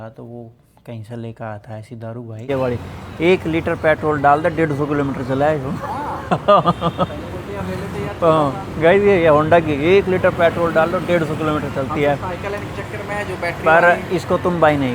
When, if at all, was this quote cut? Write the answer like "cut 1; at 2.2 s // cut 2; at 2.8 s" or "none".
cut 1; at 2.5 s